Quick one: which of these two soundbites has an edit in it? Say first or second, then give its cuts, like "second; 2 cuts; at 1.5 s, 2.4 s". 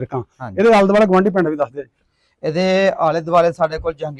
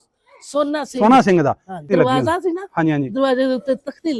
second; 1 cut; at 1.8 s